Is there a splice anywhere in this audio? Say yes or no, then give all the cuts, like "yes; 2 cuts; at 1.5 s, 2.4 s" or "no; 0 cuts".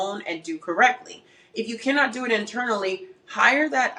no; 0 cuts